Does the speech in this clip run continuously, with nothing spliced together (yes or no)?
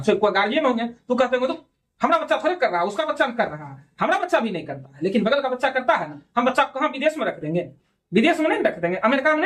yes